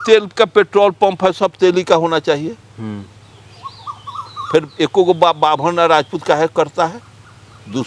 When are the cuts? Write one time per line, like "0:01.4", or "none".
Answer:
none